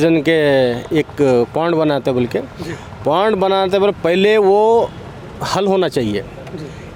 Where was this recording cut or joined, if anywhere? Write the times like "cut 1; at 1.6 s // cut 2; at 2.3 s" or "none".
none

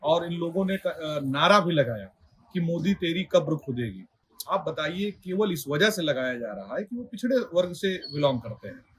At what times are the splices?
none

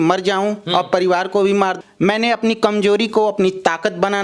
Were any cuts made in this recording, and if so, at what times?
cut 1; at 1.7 s

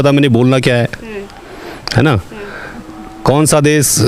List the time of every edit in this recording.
none

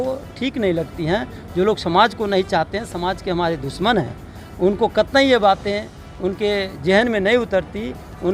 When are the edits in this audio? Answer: none

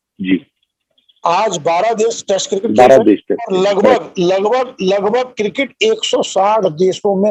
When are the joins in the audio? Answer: none

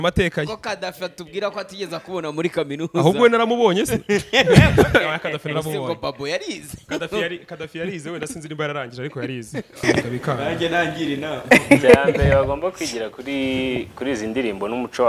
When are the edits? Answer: cut 1; at 9.7 s

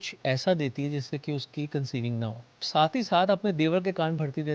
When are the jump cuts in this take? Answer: cut 1; at 2.7 s

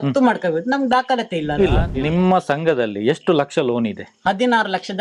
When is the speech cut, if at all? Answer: cut 1; at 1.9 s

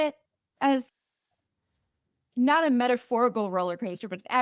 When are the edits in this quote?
none

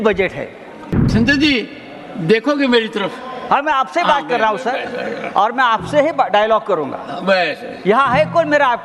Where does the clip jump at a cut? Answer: cut 1; at 0.9 s

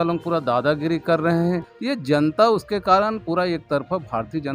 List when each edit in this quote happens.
cut 1; at 1.7 s

